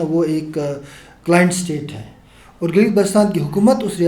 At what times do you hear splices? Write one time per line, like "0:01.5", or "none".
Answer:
none